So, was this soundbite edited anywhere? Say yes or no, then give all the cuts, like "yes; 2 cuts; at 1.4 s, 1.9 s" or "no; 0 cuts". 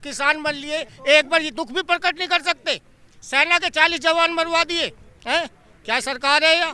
no; 0 cuts